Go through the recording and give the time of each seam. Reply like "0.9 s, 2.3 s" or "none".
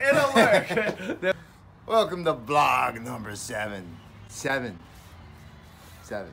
1.3 s